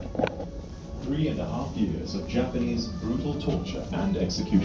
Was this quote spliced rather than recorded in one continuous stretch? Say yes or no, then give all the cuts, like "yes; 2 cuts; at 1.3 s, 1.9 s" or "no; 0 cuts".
no; 0 cuts